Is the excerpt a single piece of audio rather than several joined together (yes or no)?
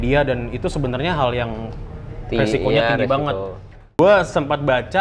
no